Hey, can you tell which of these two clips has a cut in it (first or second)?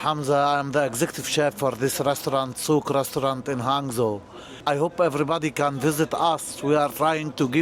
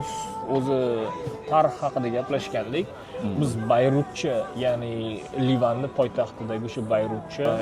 first